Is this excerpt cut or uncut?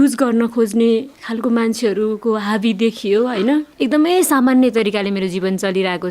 cut